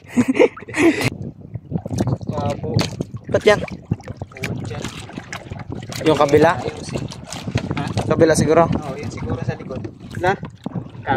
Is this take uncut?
no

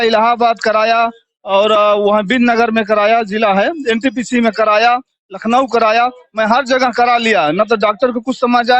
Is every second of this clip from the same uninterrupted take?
yes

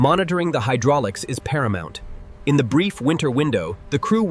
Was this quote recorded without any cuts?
yes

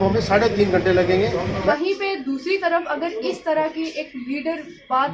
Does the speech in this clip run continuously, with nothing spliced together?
no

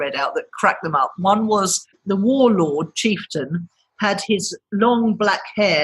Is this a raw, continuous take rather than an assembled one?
no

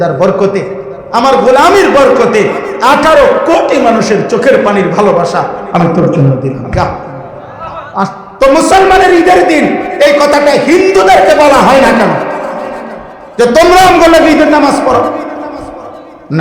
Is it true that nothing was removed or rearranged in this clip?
no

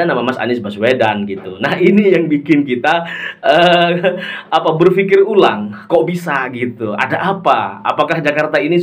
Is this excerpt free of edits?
yes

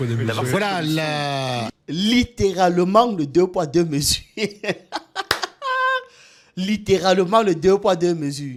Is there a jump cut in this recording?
no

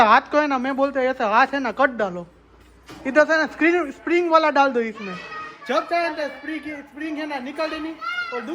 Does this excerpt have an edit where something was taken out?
no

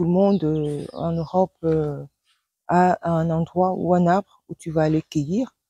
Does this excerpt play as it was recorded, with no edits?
yes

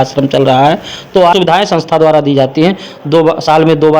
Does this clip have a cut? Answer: yes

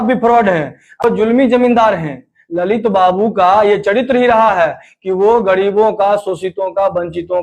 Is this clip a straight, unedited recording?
no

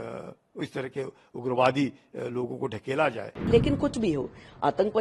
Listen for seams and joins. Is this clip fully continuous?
no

